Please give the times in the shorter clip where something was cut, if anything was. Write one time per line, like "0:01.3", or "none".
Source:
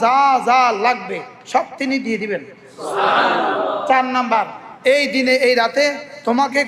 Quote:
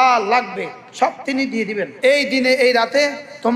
0:01.9